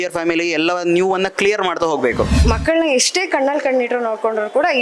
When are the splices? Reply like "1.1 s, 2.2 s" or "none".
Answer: 2.4 s